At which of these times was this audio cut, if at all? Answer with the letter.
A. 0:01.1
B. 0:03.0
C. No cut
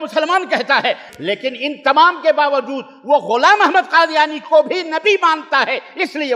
A